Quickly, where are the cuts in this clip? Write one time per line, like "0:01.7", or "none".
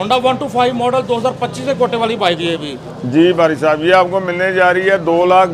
none